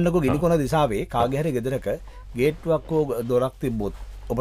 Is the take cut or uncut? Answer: uncut